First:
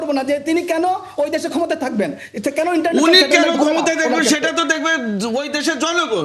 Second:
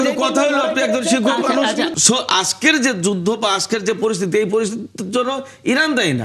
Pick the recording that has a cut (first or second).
second